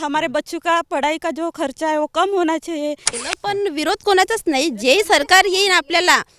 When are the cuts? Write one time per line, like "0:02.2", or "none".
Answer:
0:03.1